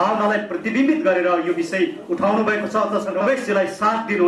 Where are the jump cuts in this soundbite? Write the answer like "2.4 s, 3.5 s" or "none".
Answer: 3.2 s

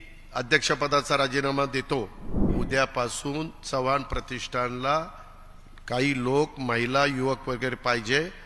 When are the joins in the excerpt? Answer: 2.5 s

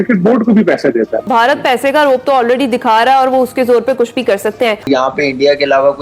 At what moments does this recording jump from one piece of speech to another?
1.3 s, 4.8 s

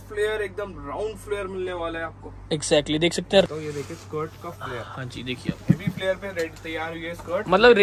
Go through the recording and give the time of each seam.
3.5 s

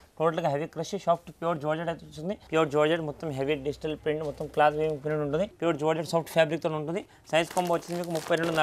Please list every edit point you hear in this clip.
2.4 s, 5.5 s

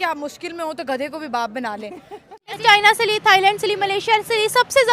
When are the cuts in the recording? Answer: 2.3 s

